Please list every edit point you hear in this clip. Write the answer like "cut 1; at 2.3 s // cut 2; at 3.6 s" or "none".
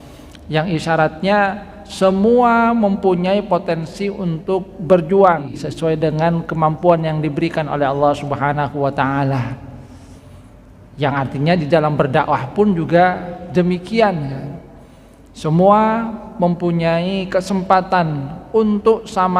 cut 1; at 5.5 s